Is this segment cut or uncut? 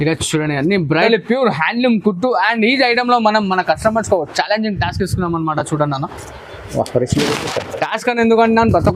cut